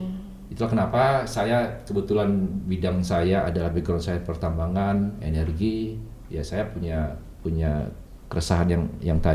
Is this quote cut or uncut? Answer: uncut